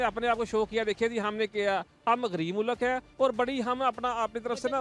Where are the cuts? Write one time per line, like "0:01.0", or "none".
none